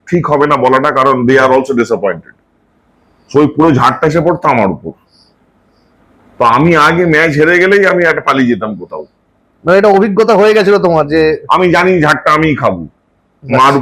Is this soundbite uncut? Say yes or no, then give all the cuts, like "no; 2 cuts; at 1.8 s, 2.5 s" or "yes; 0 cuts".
yes; 0 cuts